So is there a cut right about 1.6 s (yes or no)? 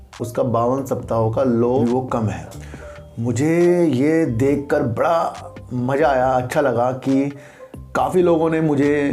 yes